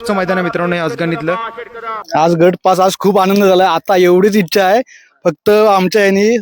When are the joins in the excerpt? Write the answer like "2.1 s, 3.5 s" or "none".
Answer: 2.0 s